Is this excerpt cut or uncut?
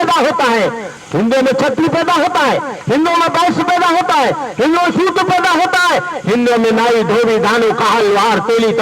cut